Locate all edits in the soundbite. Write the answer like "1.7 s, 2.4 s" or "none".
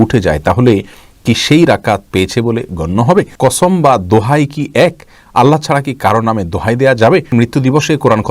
3.3 s, 7.3 s